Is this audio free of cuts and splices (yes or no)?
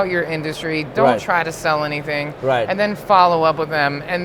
yes